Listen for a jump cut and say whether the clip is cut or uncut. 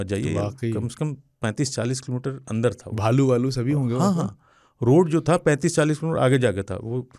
uncut